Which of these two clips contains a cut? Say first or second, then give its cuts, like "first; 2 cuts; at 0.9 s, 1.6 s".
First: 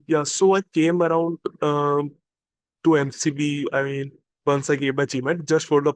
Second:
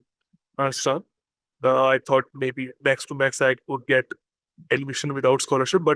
second; 1 cut; at 1.5 s